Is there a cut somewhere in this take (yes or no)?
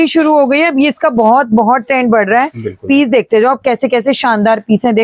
no